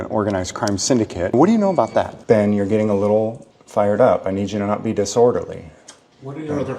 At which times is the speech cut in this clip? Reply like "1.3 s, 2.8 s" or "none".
1.3 s, 2.1 s